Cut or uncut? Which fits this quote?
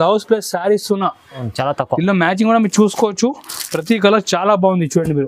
cut